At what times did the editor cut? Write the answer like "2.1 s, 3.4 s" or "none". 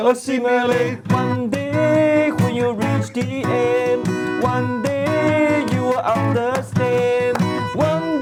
none

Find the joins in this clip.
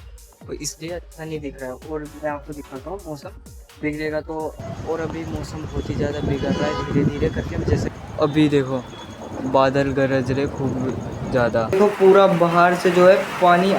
4.6 s, 7.8 s, 11.7 s

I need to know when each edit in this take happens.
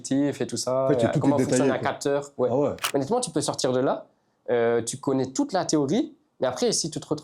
2.8 s

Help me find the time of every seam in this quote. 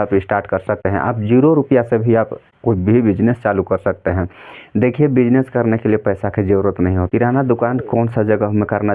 0.8 s, 2.4 s, 7.1 s

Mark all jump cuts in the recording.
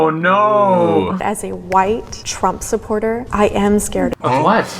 1.2 s

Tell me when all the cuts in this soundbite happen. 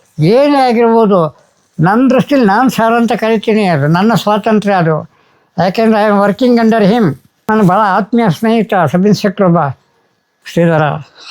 7.3 s

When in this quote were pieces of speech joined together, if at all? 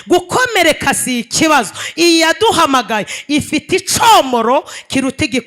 none

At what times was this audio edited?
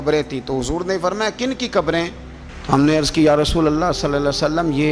none

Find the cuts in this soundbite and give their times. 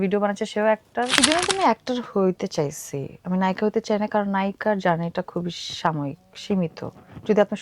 1.2 s

